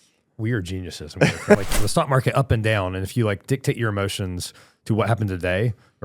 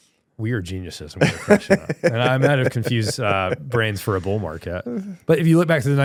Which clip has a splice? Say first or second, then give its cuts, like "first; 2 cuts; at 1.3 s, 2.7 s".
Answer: first; 1 cut; at 1.5 s